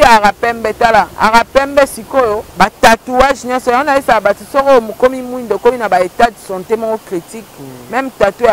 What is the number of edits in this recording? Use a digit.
2